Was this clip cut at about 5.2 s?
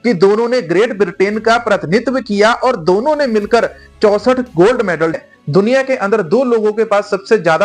yes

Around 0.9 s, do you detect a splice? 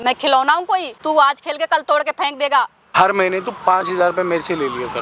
yes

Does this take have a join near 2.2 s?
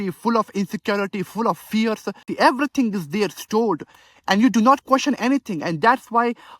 yes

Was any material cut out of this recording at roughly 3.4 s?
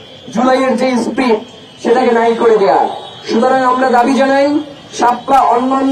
no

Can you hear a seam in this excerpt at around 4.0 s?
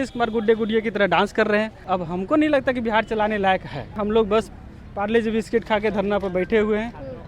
yes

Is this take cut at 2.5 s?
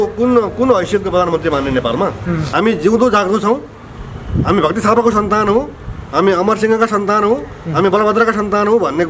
yes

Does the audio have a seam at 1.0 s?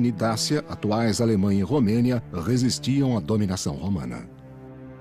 no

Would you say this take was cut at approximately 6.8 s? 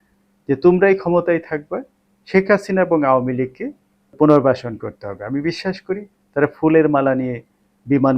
no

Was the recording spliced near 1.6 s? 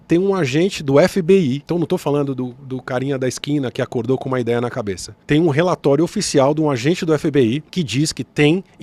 yes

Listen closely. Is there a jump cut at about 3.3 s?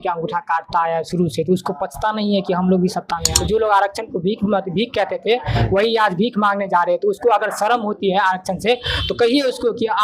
yes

